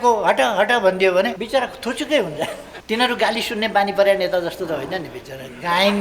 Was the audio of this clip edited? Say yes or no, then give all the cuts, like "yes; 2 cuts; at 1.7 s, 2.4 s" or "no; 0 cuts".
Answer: yes; 2 cuts; at 1.4 s, 2.7 s